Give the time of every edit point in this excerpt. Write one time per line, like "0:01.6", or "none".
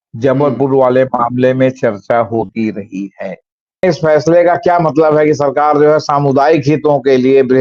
0:03.8